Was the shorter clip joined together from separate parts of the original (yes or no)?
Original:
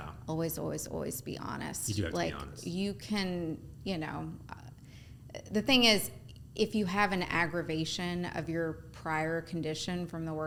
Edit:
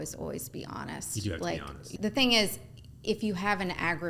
yes